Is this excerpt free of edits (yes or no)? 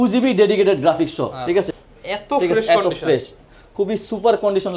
no